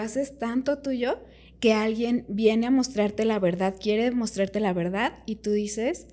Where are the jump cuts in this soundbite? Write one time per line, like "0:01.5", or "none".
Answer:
none